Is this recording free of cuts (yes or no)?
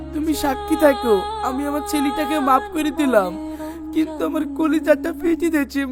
yes